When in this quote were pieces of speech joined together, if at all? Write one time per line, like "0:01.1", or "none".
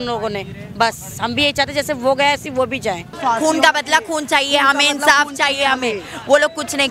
0:03.1